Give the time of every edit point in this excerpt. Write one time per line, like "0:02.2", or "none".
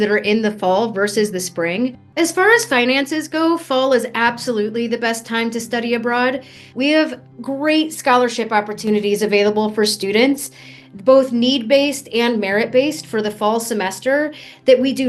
0:02.0
0:06.6